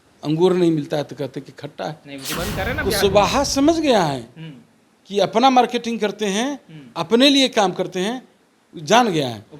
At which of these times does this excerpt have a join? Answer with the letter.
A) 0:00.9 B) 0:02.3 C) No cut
B